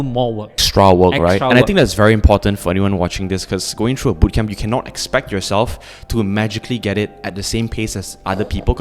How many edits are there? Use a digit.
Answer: 0